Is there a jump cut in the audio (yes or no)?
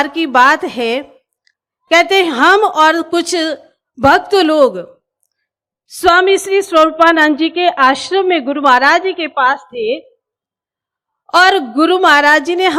no